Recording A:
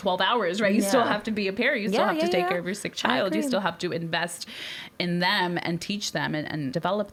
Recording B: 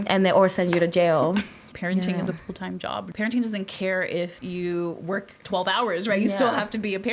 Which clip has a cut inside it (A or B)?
B